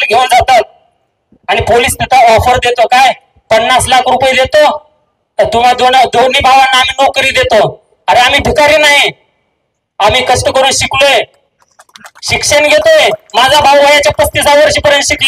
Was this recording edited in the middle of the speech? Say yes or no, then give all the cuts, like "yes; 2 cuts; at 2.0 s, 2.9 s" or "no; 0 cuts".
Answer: no; 0 cuts